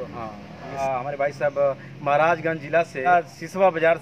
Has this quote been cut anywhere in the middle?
yes; 2 cuts; at 0.8 s, 3.1 s

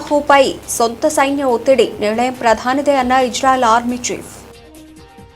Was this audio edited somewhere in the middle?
yes; 1 cut; at 4.4 s

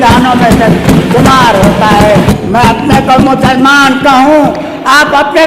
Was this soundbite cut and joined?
yes; 1 cut; at 2.3 s

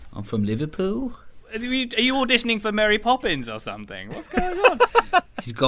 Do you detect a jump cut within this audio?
no; 0 cuts

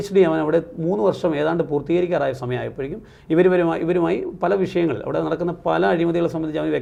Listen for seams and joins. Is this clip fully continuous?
yes; 0 cuts

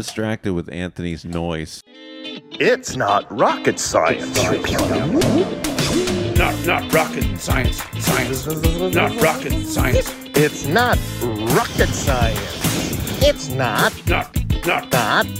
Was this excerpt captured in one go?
no; 1 cut; at 1.8 s

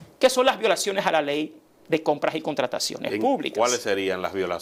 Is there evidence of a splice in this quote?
no; 0 cuts

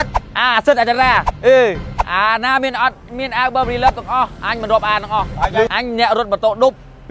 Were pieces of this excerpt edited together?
yes; 2 cuts; at 1.9 s, 5.7 s

